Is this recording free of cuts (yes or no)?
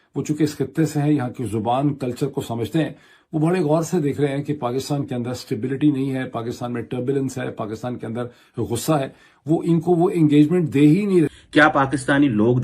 no